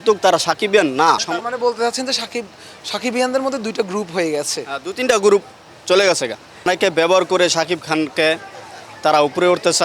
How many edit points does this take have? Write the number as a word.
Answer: two